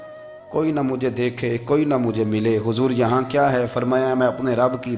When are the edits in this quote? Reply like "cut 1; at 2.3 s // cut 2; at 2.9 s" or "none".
none